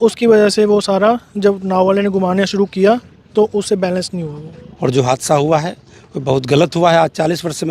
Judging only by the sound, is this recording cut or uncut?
cut